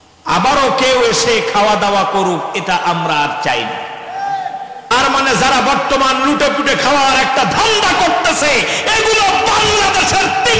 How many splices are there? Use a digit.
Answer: 1